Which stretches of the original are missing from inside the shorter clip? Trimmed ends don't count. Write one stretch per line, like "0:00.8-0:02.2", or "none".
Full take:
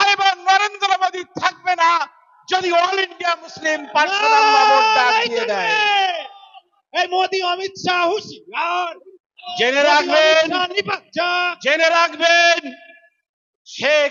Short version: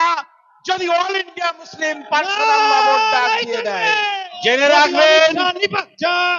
0:06.1-0:09.4